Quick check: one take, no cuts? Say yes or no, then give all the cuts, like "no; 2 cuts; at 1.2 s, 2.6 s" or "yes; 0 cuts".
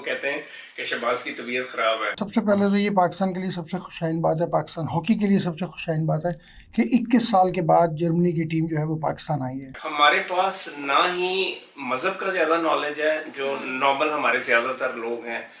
no; 2 cuts; at 2.2 s, 9.7 s